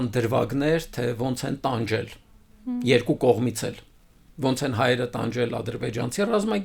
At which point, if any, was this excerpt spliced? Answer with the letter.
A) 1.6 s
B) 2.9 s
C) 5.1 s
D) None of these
D